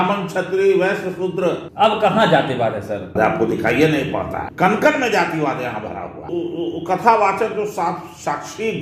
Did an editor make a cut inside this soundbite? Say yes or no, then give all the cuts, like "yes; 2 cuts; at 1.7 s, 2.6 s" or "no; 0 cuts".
yes; 4 cuts; at 1.6 s, 3.1 s, 4.4 s, 6.3 s